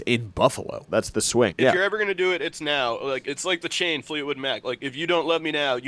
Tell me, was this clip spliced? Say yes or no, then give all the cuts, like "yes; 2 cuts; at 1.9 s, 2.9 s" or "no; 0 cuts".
yes; 2 cuts; at 1.3 s, 3.2 s